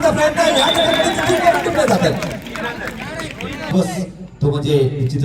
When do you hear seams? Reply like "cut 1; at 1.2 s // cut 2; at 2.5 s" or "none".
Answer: cut 1; at 3.7 s